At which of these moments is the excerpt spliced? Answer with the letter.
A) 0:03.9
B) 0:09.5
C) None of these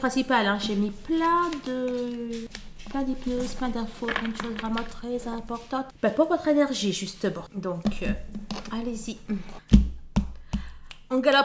B